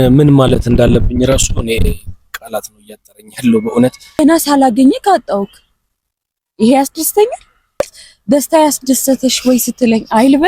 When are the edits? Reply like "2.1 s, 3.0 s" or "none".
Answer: 4.2 s, 7.8 s